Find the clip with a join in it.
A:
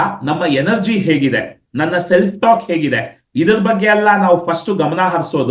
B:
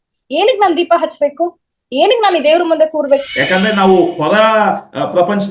B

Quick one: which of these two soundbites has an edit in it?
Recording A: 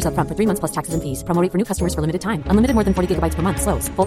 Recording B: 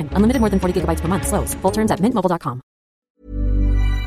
B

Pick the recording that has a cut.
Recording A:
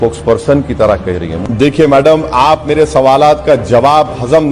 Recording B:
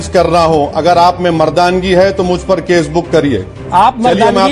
A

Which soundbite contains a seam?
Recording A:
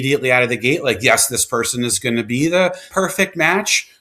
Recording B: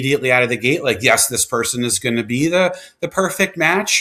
A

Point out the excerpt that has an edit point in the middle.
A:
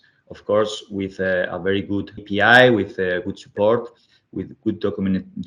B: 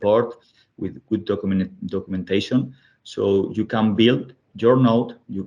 A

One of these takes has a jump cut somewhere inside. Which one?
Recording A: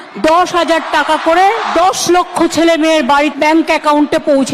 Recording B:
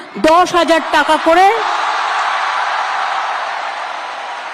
A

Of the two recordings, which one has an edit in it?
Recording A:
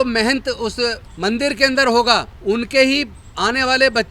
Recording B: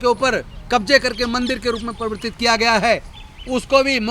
A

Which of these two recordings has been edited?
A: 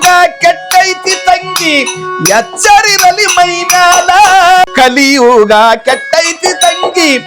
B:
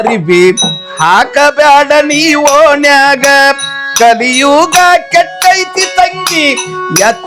A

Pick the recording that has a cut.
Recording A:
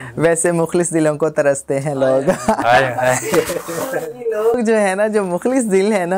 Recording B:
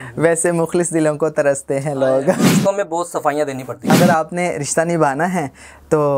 B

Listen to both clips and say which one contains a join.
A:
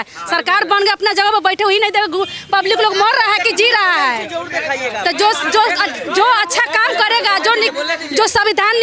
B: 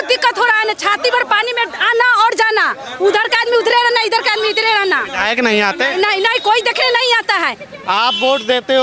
B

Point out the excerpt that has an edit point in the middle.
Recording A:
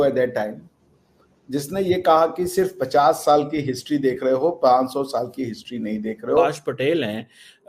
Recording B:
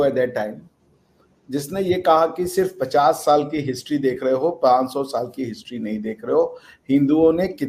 A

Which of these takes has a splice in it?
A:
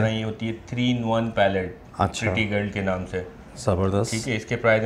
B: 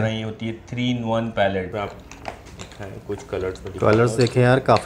B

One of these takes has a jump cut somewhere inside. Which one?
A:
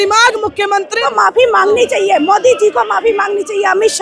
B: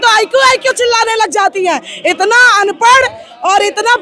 A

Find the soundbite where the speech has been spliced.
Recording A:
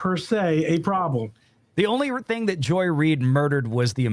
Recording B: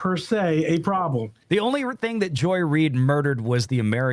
B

